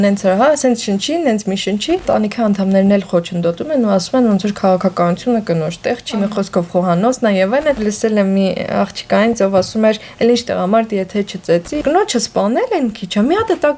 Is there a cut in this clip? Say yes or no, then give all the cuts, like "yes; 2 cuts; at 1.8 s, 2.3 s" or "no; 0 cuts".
yes; 3 cuts; at 2.0 s, 7.8 s, 11.8 s